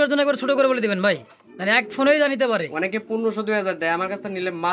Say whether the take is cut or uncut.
uncut